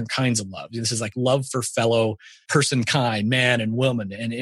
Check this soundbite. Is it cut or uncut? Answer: cut